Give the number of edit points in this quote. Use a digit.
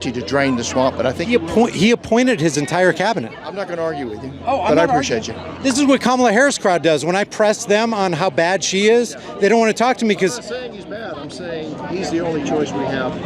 0